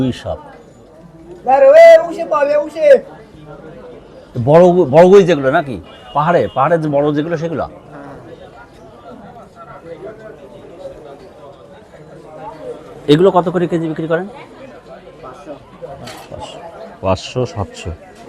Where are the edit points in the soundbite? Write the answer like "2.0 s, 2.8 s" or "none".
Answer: none